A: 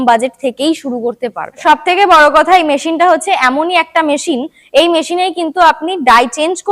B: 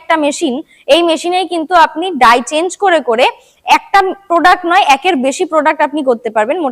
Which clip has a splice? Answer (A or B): A